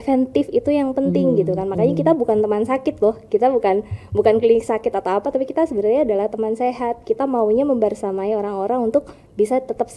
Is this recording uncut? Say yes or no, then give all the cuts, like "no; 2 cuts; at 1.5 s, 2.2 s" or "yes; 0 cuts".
yes; 0 cuts